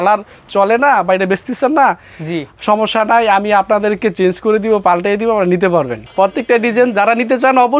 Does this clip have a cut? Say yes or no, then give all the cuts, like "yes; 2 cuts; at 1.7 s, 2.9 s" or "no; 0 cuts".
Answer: yes; 1 cut; at 6.0 s